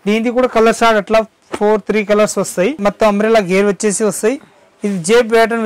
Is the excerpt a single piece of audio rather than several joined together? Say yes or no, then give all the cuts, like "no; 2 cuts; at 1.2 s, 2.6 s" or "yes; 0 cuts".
no; 1 cut; at 2.8 s